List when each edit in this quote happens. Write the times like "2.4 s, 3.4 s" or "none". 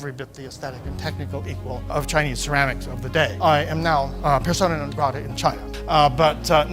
none